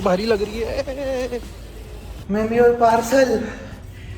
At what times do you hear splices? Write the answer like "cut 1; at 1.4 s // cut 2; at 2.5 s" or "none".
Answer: cut 1; at 2.2 s